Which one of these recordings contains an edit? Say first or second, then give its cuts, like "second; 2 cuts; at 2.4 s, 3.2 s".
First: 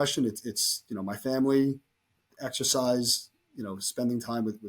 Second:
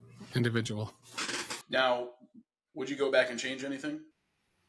second; 1 cut; at 1.5 s